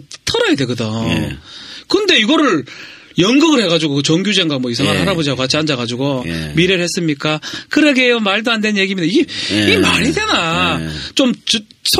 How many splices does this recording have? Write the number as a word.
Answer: one